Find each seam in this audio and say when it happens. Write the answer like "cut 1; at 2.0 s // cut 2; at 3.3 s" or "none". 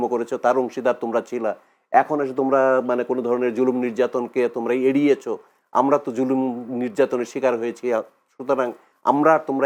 none